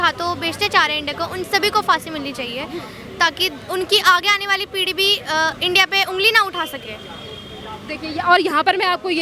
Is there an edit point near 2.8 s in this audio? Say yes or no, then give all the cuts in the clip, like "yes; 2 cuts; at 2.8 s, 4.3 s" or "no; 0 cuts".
no; 0 cuts